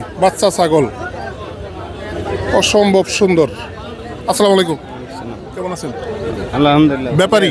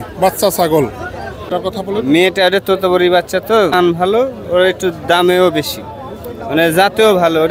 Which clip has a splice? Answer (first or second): second